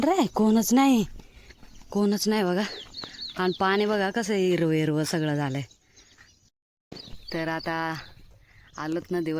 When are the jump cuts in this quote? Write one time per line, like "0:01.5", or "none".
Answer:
0:06.4